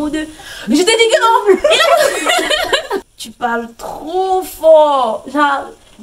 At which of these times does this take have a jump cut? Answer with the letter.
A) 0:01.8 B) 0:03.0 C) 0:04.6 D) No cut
B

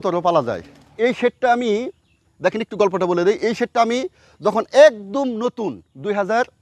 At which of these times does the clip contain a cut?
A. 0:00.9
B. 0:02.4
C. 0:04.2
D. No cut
A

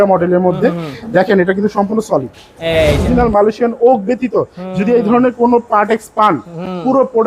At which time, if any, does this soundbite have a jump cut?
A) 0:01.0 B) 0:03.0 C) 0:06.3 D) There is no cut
B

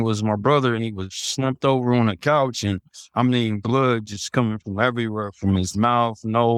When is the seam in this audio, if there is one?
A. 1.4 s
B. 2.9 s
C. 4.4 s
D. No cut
D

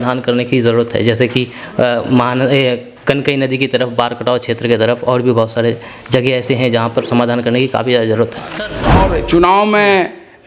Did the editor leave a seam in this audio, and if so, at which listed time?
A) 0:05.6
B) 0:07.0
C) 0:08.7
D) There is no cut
C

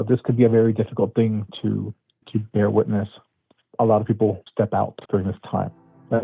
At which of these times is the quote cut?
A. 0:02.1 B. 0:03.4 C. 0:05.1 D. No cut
A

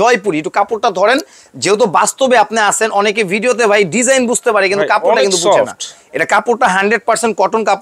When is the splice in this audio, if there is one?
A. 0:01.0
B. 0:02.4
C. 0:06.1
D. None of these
D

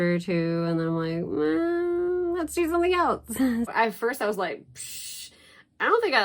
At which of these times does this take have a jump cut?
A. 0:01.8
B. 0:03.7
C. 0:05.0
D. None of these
B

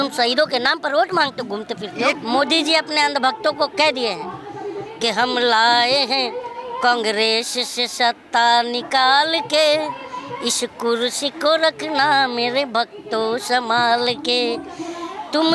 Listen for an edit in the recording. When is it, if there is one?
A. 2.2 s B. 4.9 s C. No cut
A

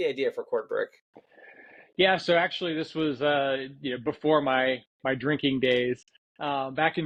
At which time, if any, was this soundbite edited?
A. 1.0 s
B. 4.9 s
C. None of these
C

